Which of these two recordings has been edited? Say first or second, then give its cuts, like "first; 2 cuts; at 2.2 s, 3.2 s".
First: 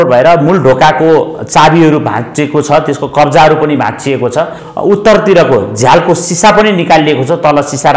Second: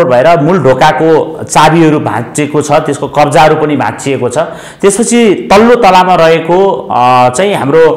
first; 1 cut; at 4.6 s